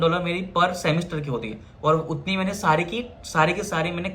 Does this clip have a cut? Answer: no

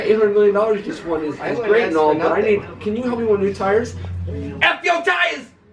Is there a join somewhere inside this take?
no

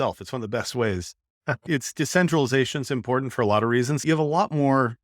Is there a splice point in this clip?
yes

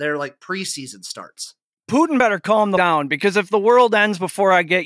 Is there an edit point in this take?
yes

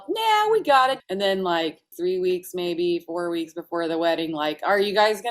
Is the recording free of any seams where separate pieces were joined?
no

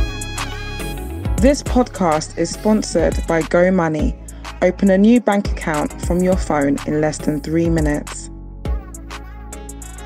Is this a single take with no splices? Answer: no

